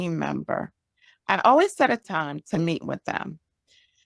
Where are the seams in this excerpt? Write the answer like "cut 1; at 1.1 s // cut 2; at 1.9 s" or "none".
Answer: cut 1; at 2.0 s